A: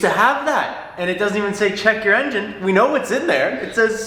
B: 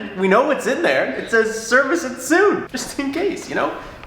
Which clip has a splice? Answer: B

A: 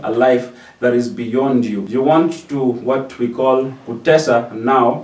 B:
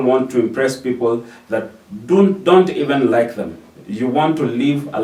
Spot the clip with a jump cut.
A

